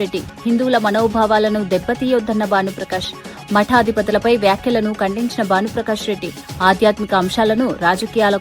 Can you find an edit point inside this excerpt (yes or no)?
no